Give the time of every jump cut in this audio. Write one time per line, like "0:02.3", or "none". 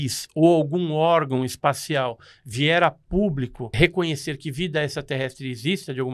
0:03.8